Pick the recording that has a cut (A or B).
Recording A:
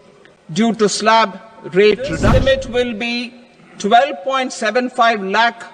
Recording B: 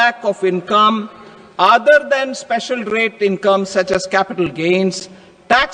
A